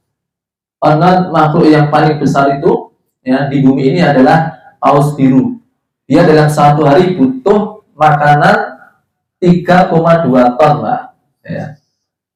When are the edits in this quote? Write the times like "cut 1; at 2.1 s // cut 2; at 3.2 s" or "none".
none